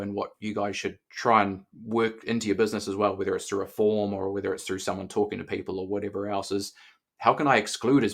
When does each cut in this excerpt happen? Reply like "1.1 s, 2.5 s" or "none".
1.1 s